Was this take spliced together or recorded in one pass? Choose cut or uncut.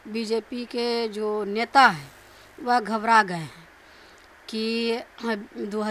uncut